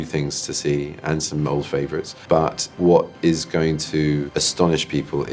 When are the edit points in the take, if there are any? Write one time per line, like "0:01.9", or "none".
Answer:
0:02.7
0:04.4